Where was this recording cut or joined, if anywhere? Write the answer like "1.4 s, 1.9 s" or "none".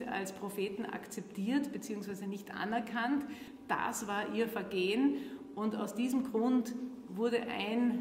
3.5 s